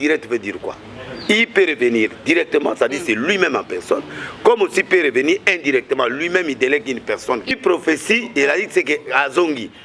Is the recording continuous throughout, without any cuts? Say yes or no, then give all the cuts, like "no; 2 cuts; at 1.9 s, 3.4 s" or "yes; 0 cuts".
no; 1 cut; at 7.5 s